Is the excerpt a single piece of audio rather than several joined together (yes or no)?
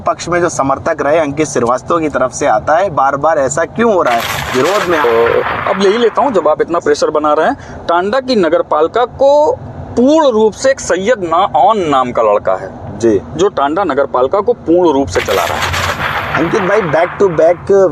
no